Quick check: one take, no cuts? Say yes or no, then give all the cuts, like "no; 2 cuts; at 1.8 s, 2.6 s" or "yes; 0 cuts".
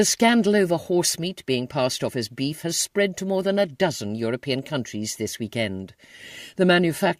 yes; 0 cuts